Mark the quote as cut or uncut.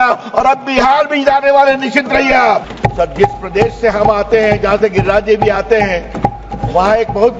cut